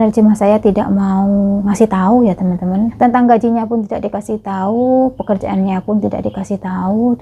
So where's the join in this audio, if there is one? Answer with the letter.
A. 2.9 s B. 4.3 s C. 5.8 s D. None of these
A